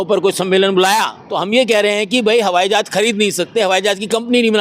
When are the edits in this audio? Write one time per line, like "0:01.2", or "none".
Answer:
0:01.2